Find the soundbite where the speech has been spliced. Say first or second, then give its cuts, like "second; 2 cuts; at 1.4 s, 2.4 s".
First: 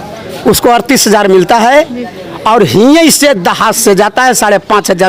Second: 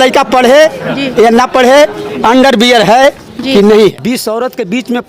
second; 1 cut; at 3.9 s